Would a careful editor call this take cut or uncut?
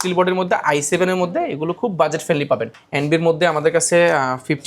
cut